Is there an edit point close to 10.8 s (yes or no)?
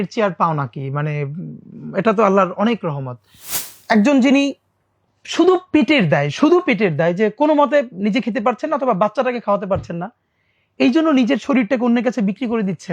no